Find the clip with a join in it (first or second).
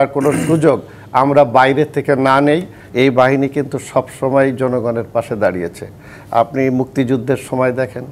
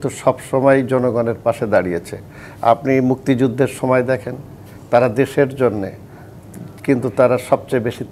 first